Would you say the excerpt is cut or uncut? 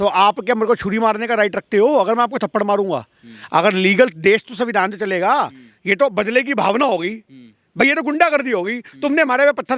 uncut